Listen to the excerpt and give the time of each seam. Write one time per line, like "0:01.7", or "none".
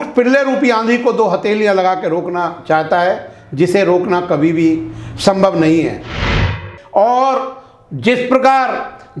0:06.6

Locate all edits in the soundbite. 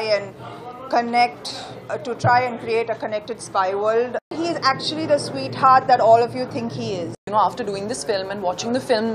0:04.3
0:07.2

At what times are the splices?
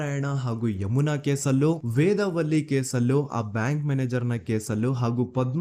none

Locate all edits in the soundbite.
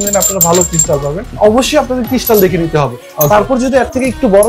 0:01.3

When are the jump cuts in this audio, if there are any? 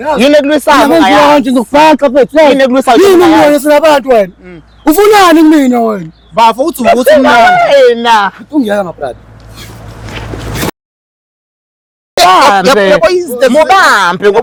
none

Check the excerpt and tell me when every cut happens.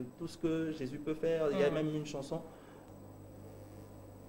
0:02.8

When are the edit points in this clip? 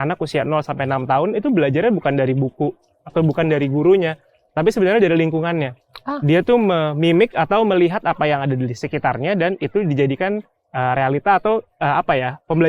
none

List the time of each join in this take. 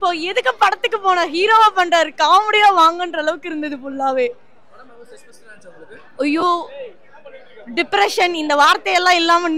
none

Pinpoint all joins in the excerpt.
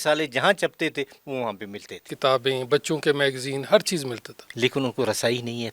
0:02.1
0:04.4

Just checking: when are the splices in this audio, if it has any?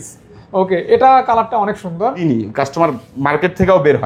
0:02.2

